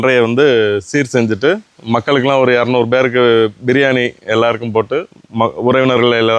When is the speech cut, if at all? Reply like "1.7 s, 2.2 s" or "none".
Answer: none